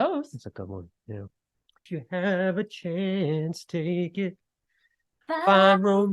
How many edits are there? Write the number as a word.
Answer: one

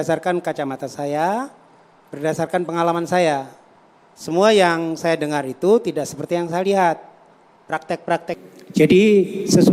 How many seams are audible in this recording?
one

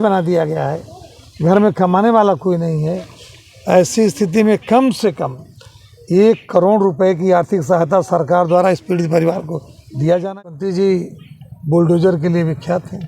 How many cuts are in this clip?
one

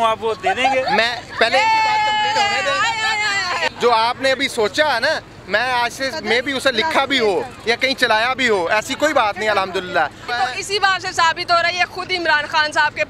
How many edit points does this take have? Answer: two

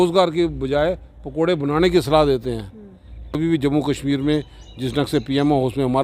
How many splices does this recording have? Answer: one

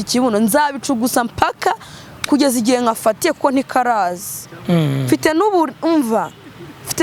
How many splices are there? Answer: zero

